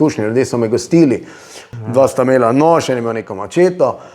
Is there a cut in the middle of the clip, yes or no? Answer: yes